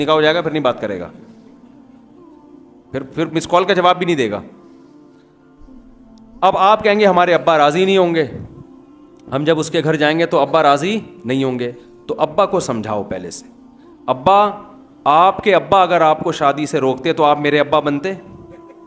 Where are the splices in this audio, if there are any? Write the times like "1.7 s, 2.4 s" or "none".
1.1 s, 2.7 s